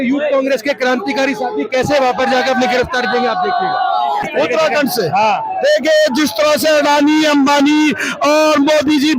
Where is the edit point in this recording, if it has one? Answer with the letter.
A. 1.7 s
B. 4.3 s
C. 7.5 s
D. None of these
B